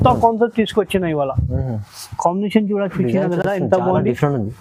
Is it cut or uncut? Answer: uncut